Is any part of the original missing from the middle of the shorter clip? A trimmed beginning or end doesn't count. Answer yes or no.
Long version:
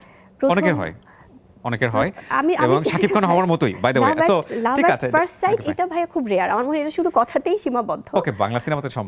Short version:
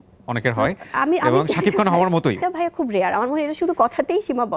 yes